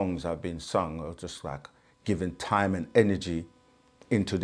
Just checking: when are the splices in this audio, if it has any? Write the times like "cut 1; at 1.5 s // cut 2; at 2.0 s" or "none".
none